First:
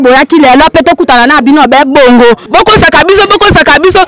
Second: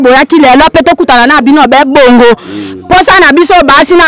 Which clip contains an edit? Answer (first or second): first